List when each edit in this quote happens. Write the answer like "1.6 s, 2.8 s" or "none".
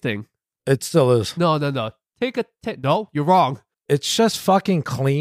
3.7 s